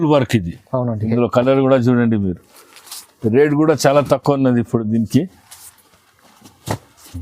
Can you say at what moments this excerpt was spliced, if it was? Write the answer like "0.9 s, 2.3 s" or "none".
1.0 s